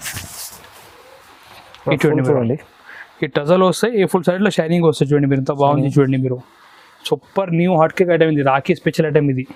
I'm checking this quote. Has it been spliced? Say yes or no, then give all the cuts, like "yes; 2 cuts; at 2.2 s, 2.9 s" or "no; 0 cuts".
no; 0 cuts